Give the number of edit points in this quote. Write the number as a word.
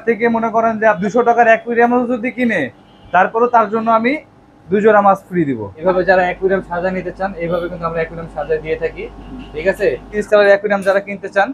three